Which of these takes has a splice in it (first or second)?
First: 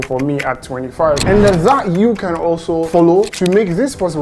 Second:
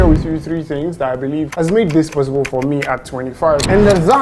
first